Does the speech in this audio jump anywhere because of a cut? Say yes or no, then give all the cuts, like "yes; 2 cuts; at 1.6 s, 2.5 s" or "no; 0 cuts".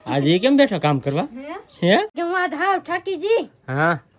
yes; 1 cut; at 2.1 s